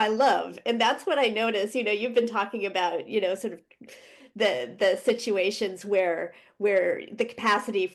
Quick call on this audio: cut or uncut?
uncut